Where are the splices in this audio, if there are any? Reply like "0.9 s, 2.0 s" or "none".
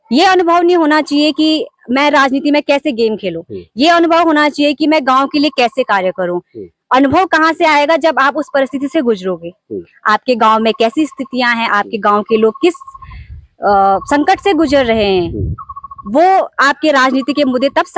none